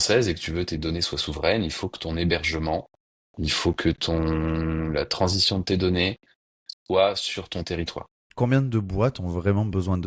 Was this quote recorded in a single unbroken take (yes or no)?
yes